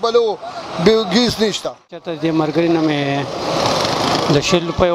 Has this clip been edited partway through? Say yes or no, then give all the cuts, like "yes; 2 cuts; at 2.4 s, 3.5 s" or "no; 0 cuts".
yes; 1 cut; at 2.1 s